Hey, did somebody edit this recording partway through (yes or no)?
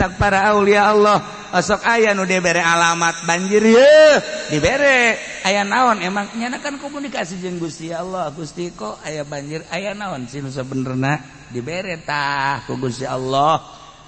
no